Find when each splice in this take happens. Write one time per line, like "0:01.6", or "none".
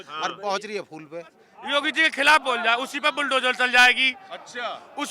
0:01.5